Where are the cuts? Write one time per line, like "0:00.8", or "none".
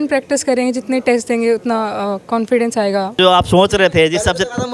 0:03.1